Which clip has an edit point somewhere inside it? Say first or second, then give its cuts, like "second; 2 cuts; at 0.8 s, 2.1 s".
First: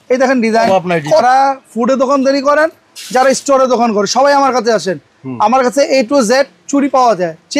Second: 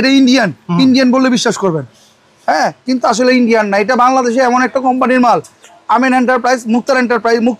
first; 1 cut; at 1.2 s